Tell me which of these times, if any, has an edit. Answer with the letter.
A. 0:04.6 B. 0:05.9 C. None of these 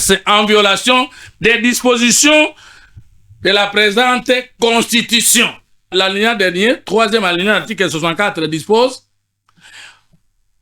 B